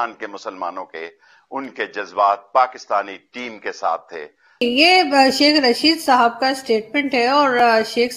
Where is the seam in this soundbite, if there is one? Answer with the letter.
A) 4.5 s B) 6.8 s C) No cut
A